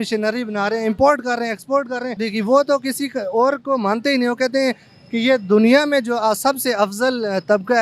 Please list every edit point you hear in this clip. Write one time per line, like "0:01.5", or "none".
0:02.2